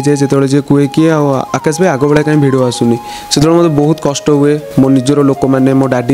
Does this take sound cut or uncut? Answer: uncut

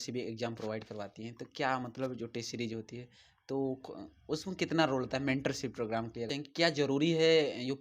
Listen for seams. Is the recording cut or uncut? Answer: cut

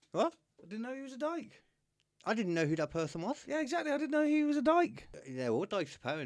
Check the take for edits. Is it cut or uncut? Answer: cut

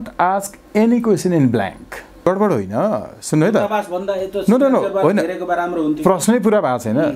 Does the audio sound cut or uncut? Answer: cut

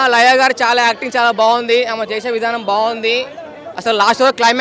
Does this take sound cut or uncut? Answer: uncut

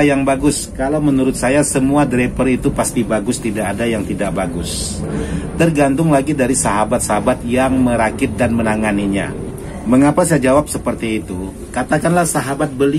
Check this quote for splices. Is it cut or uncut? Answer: uncut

